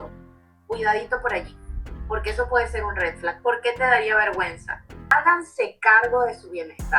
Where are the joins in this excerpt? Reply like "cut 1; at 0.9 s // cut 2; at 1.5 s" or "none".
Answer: cut 1; at 5.1 s